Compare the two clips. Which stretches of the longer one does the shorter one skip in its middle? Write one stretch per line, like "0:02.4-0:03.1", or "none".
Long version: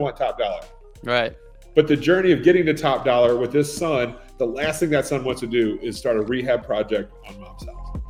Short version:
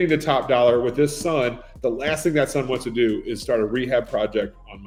none

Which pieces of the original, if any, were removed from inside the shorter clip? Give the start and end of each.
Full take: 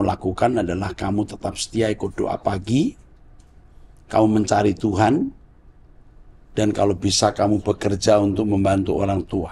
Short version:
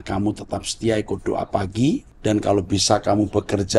0:03.0-0:06.4

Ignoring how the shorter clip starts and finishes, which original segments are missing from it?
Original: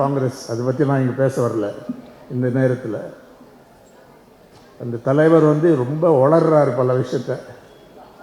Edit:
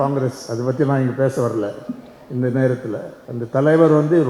0:03.2-0:04.7

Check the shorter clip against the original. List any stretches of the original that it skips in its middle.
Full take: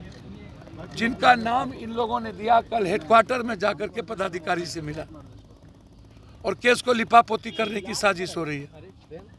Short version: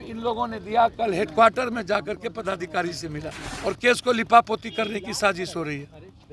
0:05.2-0:06.3

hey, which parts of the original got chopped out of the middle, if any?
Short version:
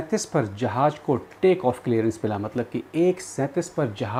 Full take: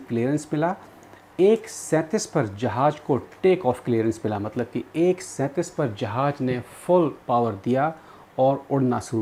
none

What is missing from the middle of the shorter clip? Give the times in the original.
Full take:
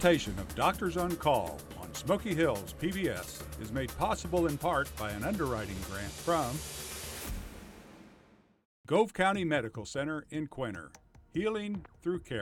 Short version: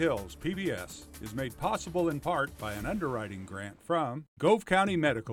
0:06.6-0:08.7

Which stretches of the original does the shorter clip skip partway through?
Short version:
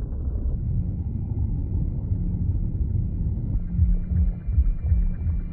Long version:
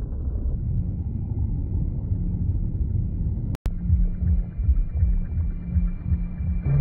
0:03.6-0:03.7

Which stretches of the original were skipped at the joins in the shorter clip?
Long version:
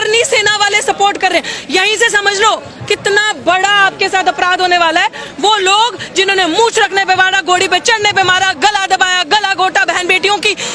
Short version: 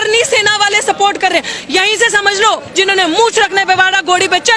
0:02.7-0:06.1

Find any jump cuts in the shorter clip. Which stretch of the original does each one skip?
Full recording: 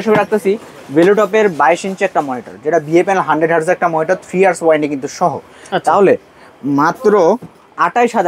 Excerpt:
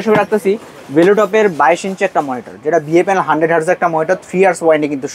none

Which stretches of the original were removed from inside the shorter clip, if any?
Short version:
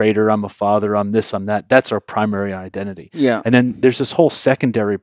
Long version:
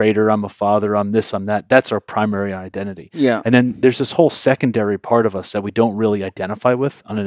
none

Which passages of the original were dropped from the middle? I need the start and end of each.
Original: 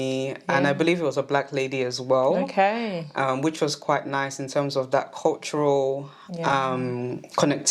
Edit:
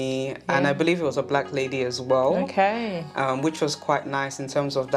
none

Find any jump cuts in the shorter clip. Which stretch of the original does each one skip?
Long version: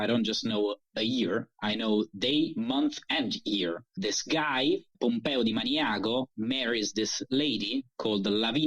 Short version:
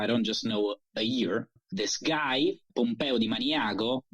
0:01.6-0:03.8

